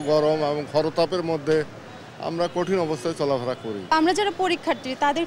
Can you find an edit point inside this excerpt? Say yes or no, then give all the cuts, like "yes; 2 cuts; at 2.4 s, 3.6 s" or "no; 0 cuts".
yes; 1 cut; at 3.9 s